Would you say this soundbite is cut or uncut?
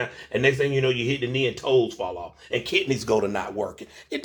uncut